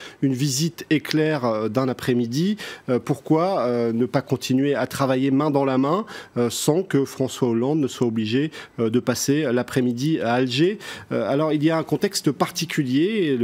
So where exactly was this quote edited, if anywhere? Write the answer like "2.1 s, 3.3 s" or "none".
10.0 s

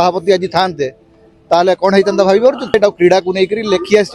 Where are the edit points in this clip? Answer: 2.7 s

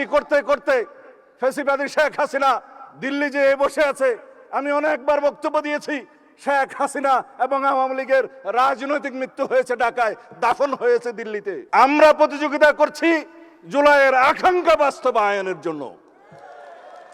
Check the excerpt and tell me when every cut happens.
11.6 s

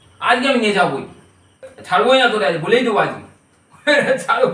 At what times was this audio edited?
1.7 s

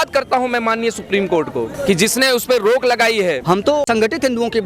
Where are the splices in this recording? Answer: 3.7 s

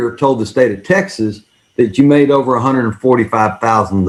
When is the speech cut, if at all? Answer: none

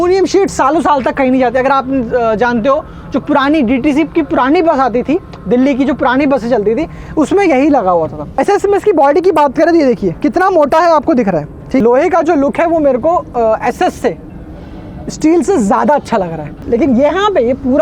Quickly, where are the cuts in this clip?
8.4 s, 11.8 s, 16.6 s

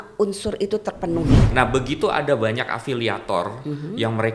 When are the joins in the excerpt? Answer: 1.5 s

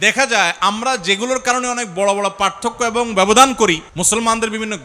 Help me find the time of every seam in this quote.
3.9 s

